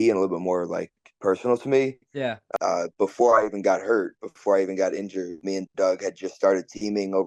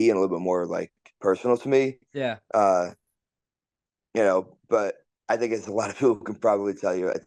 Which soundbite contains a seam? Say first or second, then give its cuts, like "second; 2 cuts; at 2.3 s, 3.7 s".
first; 2 cuts; at 2.4 s, 5.4 s